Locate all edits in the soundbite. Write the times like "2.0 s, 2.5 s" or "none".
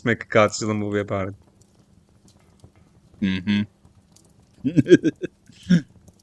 none